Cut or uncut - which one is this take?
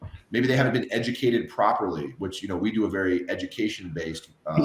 uncut